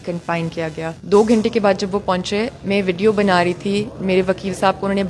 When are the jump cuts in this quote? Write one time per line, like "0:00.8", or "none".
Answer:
0:01.0